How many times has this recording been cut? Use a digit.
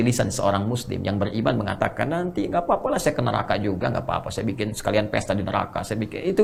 0